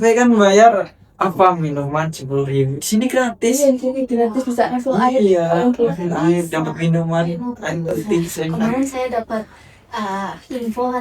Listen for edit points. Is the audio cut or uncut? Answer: cut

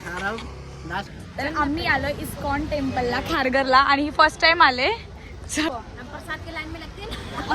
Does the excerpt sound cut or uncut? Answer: cut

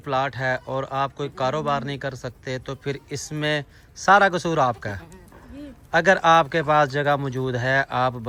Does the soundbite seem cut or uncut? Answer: uncut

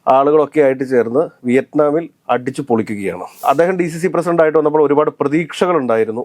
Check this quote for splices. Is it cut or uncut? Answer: cut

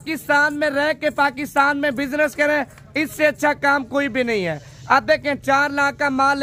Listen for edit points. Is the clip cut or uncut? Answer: uncut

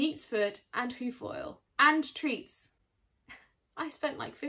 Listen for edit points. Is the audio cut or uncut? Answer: cut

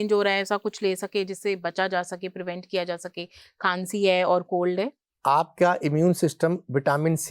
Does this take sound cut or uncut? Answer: cut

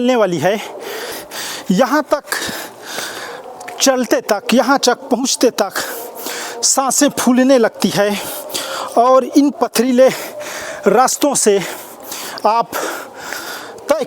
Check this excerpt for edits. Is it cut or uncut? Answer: cut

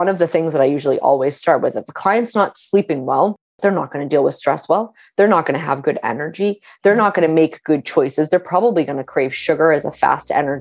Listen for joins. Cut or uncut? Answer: cut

